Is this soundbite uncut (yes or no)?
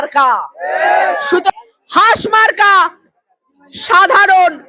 no